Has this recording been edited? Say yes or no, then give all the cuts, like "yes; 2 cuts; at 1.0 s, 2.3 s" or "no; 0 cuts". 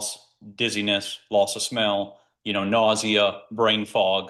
no; 0 cuts